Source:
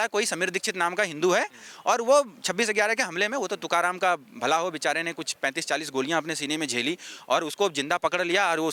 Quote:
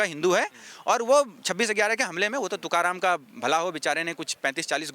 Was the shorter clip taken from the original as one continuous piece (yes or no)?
yes